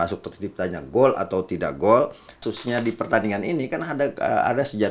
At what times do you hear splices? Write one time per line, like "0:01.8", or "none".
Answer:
0:02.5